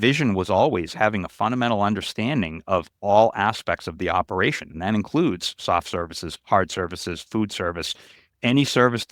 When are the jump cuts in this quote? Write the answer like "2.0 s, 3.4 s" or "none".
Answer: none